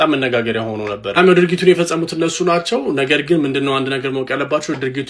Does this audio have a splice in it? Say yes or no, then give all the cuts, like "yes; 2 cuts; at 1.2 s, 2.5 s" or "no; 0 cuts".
no; 0 cuts